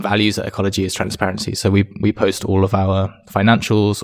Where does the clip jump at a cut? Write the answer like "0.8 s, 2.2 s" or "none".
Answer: none